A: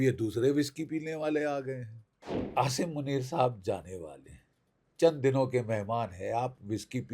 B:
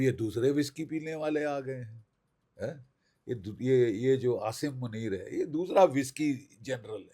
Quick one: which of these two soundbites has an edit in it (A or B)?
A